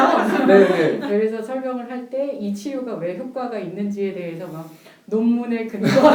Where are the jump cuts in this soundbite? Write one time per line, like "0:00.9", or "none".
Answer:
none